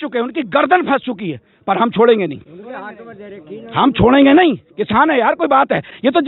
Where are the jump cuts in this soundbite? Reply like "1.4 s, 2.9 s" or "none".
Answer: none